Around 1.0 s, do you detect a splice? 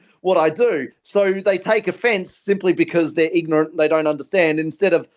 yes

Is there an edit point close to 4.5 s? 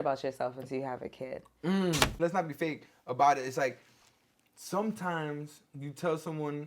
no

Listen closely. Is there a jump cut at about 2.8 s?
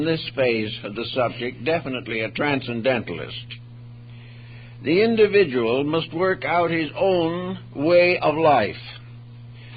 no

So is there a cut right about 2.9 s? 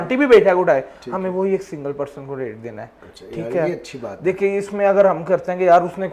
no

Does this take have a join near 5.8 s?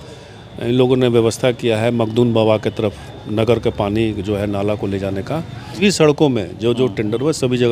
yes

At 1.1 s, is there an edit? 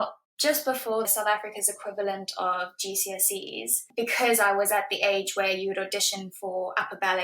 yes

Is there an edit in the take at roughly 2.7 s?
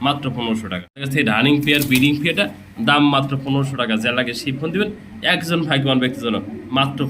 no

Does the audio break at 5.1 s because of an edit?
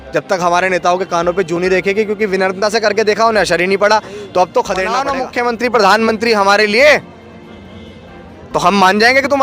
yes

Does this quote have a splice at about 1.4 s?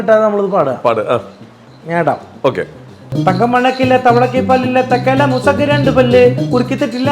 no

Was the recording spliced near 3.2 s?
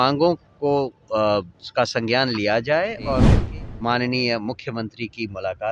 yes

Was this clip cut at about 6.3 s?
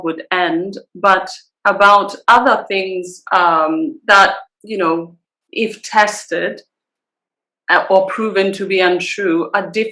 no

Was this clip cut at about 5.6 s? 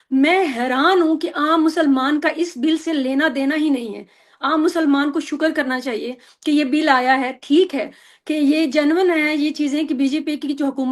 no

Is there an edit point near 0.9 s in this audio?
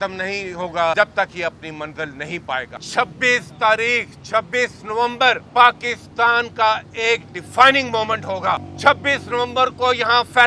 yes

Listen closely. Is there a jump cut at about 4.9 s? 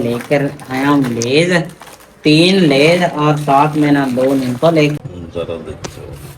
yes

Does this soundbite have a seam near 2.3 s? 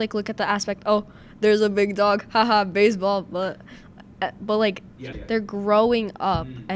no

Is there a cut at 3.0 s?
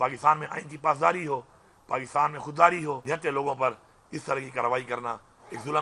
yes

